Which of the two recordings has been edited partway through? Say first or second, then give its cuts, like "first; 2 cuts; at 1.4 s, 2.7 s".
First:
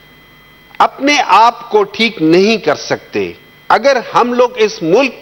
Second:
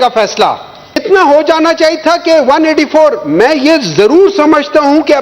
second; 1 cut; at 1.0 s